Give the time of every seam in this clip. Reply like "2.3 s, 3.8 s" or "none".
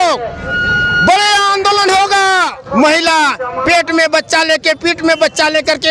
2.6 s

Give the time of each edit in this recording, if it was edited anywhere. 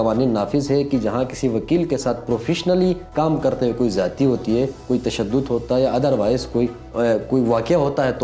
3.1 s, 4.8 s, 6.8 s

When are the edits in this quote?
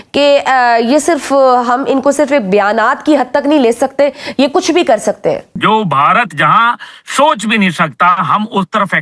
5.5 s

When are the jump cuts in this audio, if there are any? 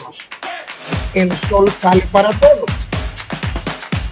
3.0 s

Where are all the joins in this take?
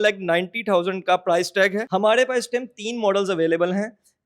1.8 s

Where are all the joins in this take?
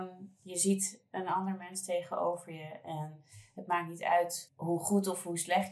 4.5 s

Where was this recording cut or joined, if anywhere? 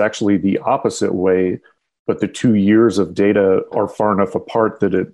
3.7 s

